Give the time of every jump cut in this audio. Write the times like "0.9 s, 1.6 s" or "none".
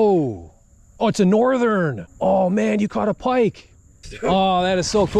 2.0 s, 4.0 s